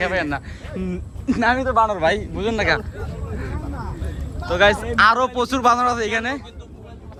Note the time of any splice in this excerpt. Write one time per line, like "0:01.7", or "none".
none